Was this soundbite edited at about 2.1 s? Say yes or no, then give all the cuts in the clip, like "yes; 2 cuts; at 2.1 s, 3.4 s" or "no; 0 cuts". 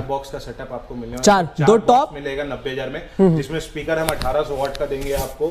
no; 0 cuts